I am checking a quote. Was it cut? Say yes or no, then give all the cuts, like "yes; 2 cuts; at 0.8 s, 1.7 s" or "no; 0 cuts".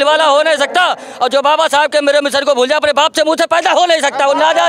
no; 0 cuts